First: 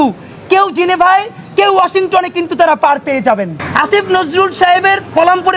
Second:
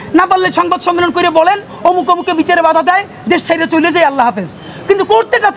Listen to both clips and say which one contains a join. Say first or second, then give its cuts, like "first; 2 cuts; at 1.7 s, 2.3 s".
first; 1 cut; at 3.6 s